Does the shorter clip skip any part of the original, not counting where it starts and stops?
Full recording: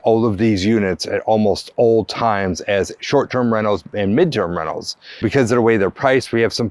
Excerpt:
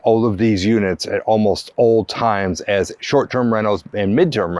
no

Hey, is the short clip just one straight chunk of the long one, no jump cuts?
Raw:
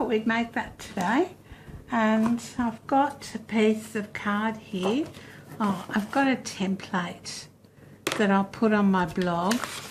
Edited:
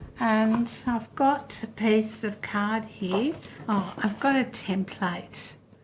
no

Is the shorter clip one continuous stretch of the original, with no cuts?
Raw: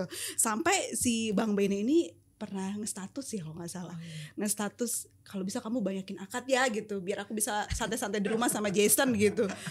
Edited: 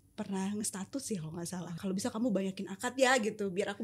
no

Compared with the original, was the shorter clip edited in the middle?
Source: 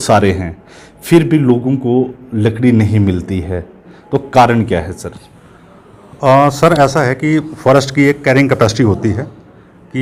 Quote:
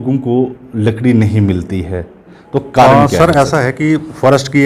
yes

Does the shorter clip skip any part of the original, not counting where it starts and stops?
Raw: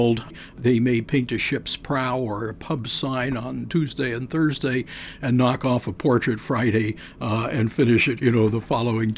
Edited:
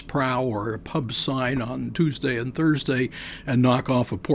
no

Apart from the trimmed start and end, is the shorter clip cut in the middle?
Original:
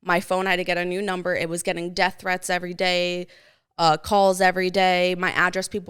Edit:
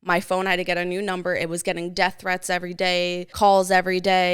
yes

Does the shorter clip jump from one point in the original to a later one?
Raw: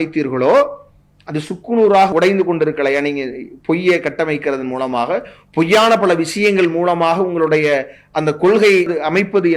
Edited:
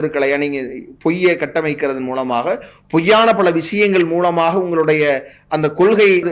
no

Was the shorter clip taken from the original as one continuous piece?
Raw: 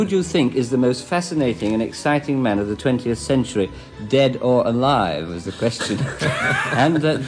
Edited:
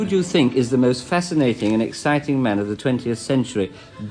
yes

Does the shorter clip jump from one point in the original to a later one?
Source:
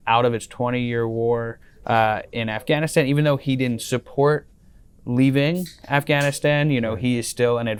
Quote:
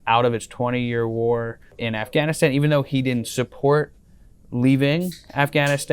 yes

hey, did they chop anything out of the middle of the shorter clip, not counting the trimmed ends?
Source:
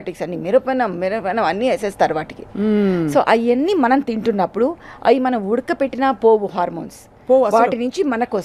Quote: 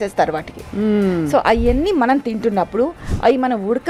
no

